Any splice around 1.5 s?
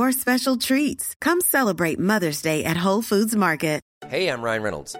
no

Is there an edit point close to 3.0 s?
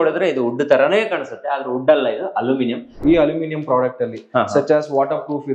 yes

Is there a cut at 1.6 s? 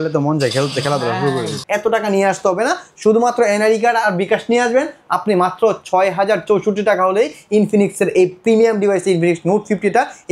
yes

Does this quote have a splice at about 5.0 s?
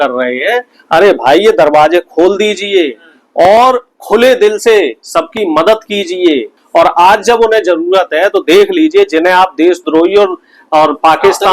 no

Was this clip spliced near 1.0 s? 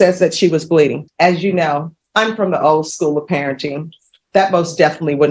yes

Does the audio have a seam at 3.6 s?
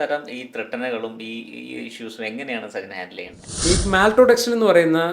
yes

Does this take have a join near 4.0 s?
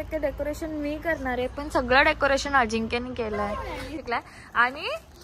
yes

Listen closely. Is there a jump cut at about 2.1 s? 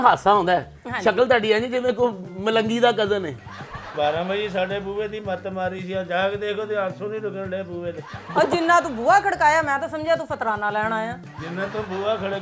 no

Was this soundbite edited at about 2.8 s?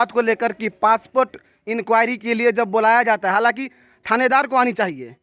no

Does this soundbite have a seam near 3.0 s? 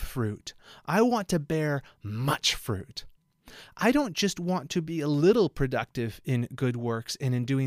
no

